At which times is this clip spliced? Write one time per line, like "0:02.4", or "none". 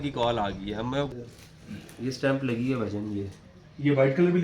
0:01.1